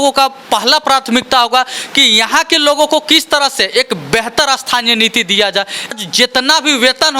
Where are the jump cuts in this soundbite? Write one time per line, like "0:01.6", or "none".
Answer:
0:05.9

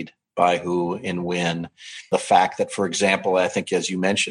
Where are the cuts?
0:02.1

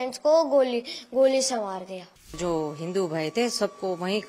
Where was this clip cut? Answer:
0:02.4

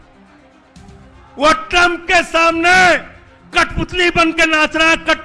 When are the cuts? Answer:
none

